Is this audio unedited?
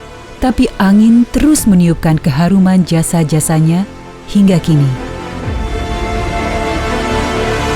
no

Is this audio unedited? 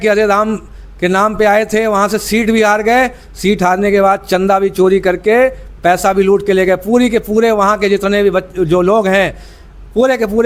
yes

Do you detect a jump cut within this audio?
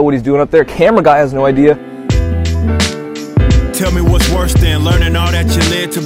yes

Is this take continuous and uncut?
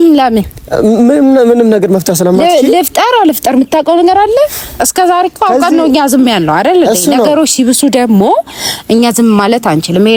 yes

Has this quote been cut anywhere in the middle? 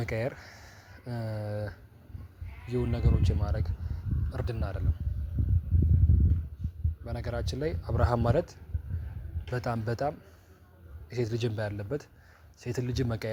no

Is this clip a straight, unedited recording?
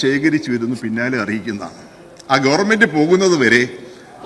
yes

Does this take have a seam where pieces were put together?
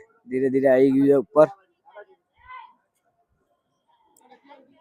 no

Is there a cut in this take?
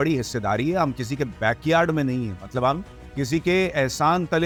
no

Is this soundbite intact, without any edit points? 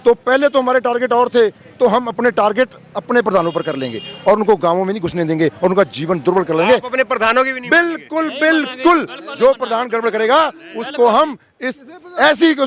yes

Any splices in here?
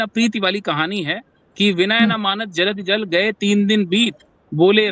no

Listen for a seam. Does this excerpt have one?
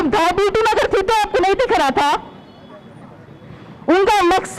no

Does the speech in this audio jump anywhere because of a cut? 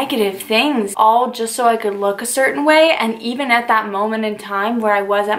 yes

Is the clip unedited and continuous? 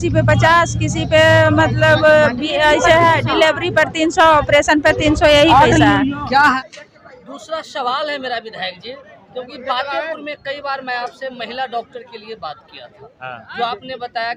no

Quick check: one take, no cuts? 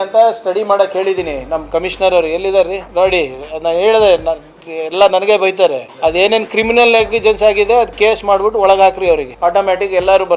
no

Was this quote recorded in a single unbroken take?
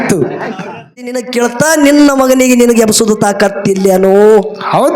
no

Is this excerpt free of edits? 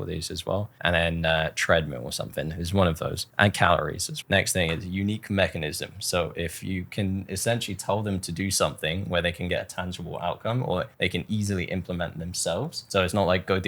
no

